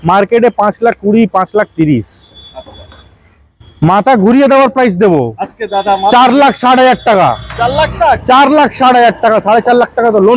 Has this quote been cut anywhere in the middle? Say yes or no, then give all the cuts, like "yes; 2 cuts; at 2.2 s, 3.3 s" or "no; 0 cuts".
no; 0 cuts